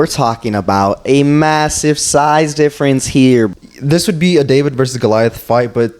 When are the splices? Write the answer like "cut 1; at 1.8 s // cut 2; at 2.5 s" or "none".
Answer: cut 1; at 3.5 s